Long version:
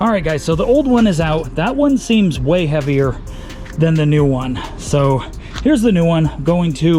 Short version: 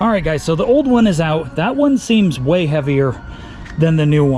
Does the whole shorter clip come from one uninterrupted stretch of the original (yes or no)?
yes